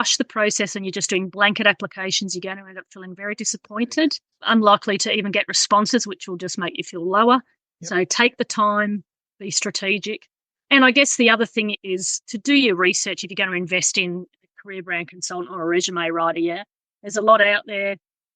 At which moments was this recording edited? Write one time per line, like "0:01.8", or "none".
0:04.3

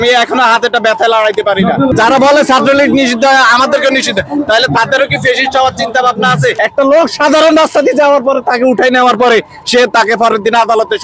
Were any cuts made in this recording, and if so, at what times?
0:01.9
0:06.6

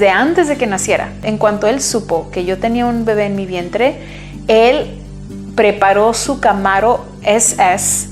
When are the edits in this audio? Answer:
0:01.2

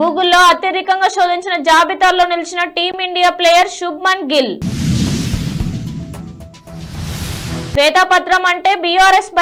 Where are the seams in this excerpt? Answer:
none

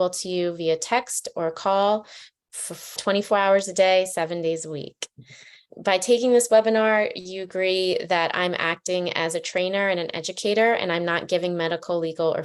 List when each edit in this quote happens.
0:03.0
0:05.7

